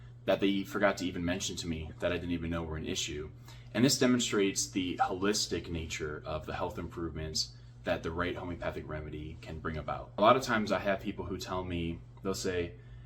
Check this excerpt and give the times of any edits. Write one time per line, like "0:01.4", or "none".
0:10.2